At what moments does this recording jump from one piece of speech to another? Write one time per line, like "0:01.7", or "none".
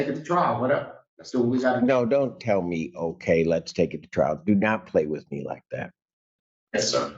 none